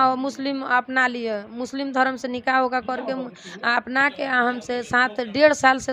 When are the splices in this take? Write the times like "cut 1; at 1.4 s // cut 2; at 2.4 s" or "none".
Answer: none